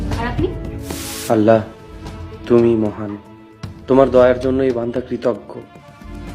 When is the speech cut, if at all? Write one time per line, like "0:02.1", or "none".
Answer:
0:01.1